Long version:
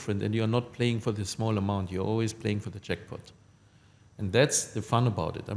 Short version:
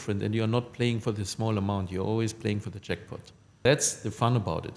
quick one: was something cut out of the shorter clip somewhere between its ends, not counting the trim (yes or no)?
yes